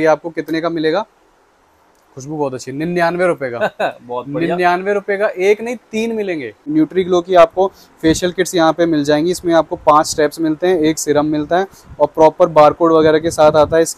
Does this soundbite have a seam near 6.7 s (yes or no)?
yes